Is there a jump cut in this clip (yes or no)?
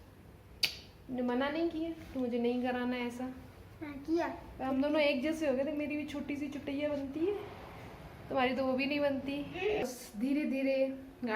yes